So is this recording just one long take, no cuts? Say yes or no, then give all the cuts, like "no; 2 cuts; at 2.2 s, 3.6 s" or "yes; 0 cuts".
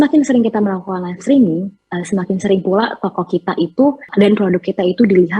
no; 1 cut; at 4.1 s